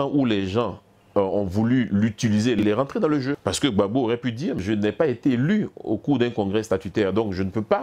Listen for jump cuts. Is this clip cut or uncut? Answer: cut